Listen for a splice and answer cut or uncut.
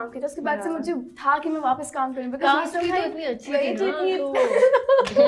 uncut